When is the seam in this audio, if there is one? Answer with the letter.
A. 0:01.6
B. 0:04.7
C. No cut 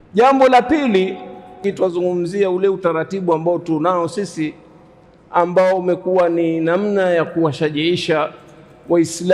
A